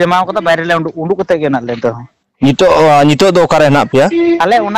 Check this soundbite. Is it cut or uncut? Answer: uncut